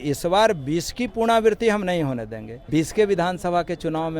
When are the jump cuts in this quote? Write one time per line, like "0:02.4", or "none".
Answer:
0:02.5